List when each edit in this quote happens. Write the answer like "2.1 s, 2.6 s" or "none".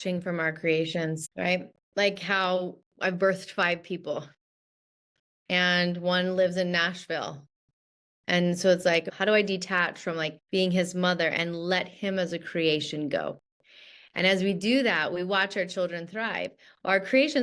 1.3 s, 9.0 s, 10.4 s

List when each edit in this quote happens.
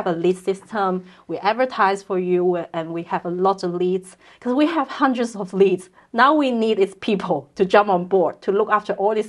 none

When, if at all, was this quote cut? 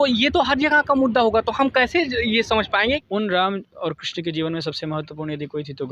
3.0 s

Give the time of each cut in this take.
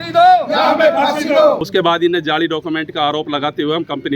1.6 s

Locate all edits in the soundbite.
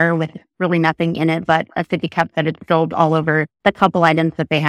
3.5 s

